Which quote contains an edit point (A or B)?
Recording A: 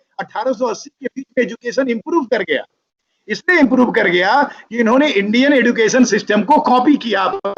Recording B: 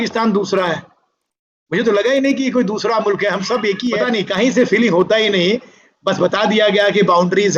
B